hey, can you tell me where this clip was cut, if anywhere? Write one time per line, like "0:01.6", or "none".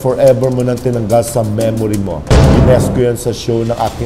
0:02.5